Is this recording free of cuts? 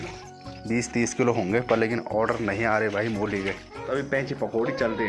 no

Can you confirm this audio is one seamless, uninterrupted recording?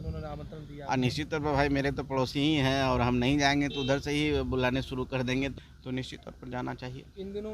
no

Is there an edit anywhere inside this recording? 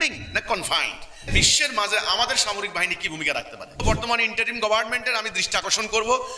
yes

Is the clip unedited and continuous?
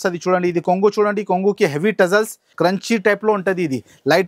no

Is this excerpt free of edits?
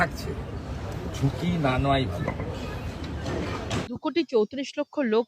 no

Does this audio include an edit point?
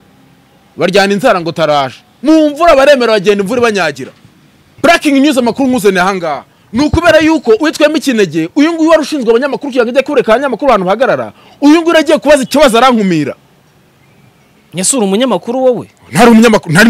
yes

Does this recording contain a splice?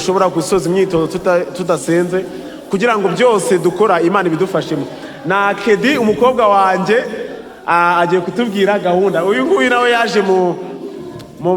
no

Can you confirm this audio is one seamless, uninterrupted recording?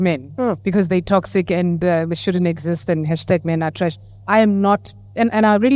yes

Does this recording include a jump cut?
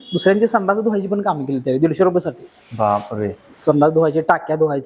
no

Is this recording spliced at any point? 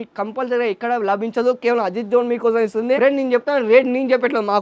no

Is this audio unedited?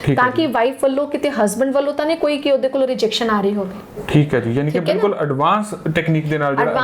yes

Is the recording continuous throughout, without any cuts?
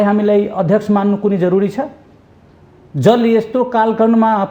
yes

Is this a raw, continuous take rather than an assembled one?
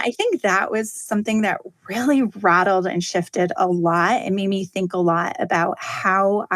yes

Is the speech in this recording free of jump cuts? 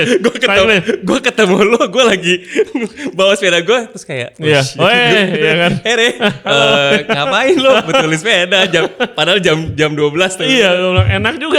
yes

